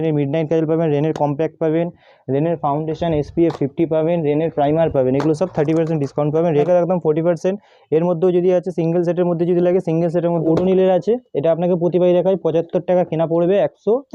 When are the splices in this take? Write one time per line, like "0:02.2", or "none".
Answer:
0:06.7
0:10.4

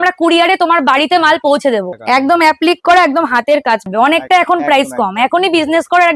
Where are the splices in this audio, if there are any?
0:01.9
0:03.9

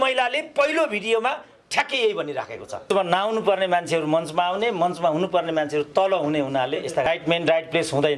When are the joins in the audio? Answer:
0:02.8
0:07.1

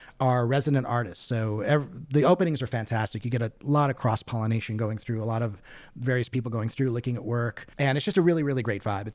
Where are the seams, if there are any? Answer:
0:07.6

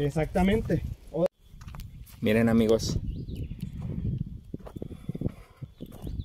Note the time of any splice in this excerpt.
0:01.3

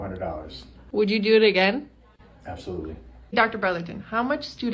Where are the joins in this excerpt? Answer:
0:03.6

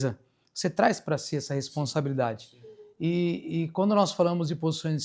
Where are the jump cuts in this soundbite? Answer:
none

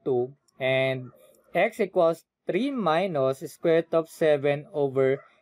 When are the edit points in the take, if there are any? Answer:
none

